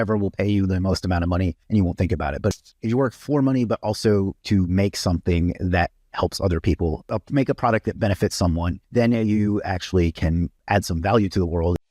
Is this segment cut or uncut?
cut